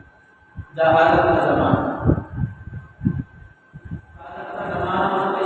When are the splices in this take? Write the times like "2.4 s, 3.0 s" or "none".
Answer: 4.5 s